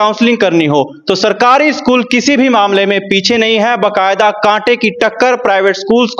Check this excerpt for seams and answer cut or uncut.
uncut